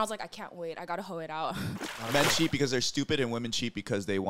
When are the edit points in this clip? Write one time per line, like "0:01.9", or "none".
0:01.8